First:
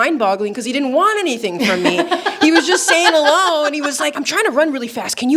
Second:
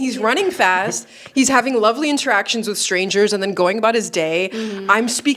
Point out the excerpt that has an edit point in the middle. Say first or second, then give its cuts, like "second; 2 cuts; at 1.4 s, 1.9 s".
first; 1 cut; at 4.2 s